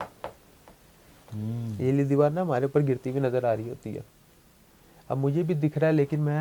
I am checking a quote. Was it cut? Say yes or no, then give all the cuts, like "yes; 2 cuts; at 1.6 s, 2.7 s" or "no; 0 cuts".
no; 0 cuts